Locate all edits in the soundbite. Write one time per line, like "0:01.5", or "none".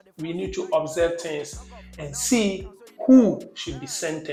none